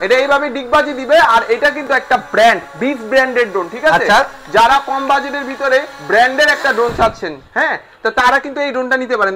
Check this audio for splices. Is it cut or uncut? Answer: uncut